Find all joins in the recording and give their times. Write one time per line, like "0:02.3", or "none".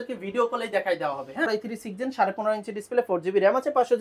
0:01.5